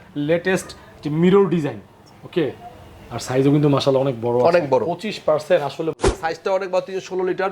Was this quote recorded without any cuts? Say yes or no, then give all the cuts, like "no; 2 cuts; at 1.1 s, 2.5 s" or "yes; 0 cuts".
no; 1 cut; at 6.0 s